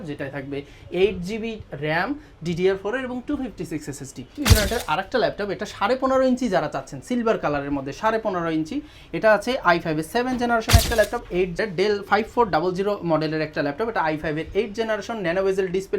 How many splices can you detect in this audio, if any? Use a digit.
2